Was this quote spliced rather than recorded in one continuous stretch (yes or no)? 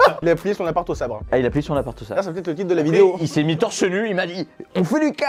no